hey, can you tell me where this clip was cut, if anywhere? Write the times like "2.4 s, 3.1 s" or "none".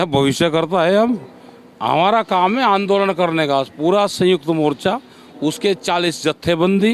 none